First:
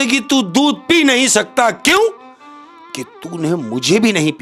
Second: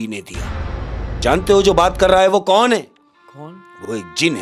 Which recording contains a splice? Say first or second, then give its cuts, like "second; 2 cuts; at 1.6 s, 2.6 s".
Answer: second; 1 cut; at 1.1 s